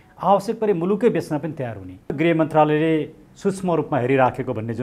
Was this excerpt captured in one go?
no; 1 cut; at 2.2 s

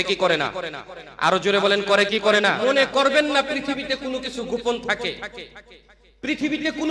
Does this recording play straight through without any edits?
no; 1 cut; at 2.6 s

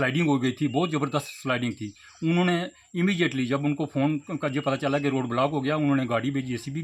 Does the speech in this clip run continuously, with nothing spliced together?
yes; 0 cuts

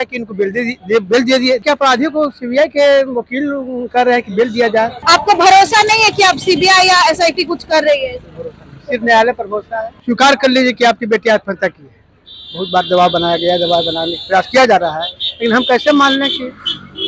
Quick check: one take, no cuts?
no; 3 cuts; at 1.6 s, 5.0 s, 9.9 s

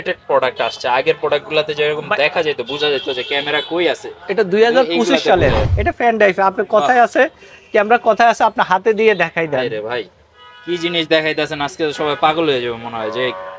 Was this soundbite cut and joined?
yes; 1 cut; at 5.6 s

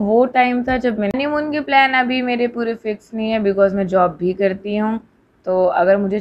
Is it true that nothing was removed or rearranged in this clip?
no; 1 cut; at 1.1 s

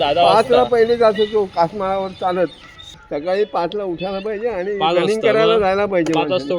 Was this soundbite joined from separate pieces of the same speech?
yes; 1 cut; at 3.0 s

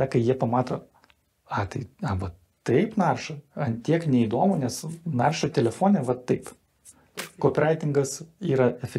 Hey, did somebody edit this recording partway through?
yes; 1 cut; at 7.3 s

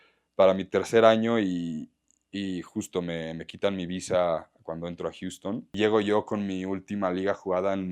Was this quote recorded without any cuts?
no; 1 cut; at 5.7 s

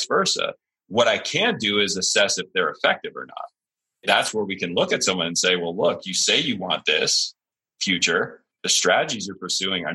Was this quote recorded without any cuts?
no; 2 cuts; at 4.0 s, 8.5 s

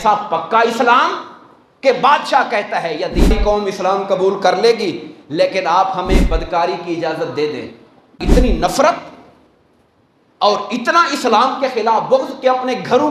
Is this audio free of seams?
no; 2 cuts; at 3.3 s, 8.2 s

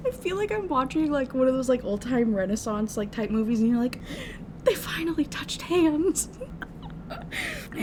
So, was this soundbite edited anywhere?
no; 0 cuts

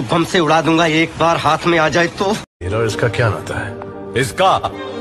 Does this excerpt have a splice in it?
yes; 1 cut; at 2.5 s

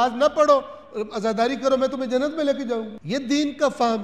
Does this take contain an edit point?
yes; 1 cut; at 3.0 s

